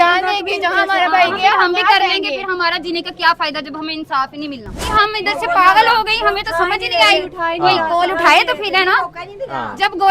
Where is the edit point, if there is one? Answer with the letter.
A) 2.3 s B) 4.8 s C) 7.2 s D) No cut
B